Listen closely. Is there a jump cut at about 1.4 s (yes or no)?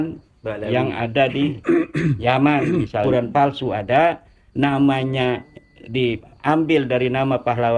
no